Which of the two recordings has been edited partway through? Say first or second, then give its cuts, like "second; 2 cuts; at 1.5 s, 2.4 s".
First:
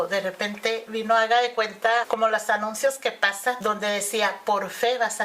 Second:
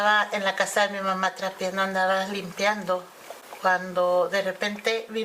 first; 2 cuts; at 2.1 s, 3.6 s